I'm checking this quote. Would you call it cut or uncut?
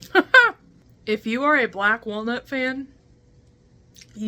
cut